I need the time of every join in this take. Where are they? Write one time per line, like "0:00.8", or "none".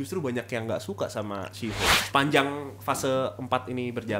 0:02.0

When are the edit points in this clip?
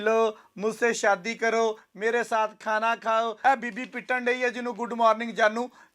0:03.3

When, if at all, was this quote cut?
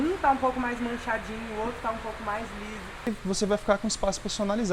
0:03.1

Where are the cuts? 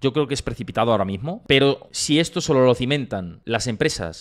0:01.3
0:01.9
0:03.3

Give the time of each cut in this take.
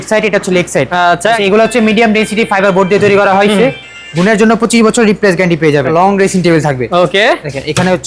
0:01.4
0:05.9

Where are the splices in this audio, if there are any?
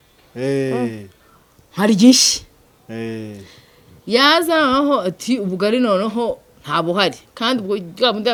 none

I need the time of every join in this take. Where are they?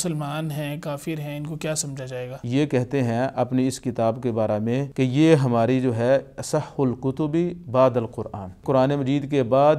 0:02.4
0:04.9
0:08.6

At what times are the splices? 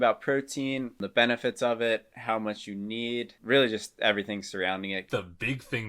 0:03.4
0:05.1

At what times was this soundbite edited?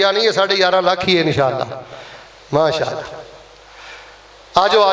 none

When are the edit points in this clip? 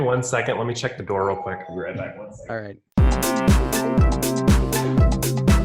0:02.8

